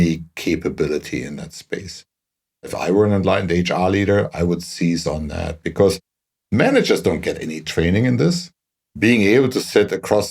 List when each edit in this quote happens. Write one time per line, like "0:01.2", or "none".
0:02.6
0:08.7